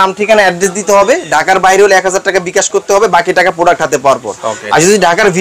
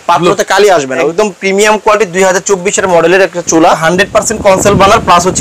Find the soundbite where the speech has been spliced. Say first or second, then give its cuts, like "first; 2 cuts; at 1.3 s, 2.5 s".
second; 2 cuts; at 1.1 s, 3.8 s